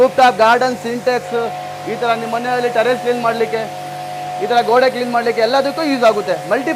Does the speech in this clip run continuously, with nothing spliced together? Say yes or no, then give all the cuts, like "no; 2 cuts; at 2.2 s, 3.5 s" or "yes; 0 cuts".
yes; 0 cuts